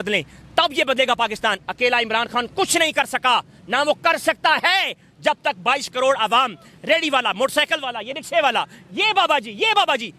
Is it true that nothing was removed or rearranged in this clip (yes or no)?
yes